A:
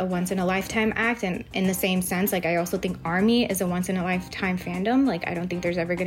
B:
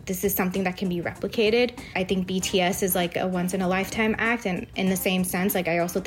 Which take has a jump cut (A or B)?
B